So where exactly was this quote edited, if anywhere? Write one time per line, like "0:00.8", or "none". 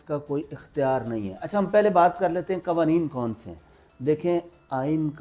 none